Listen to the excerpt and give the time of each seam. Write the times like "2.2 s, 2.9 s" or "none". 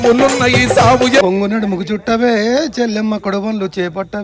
1.2 s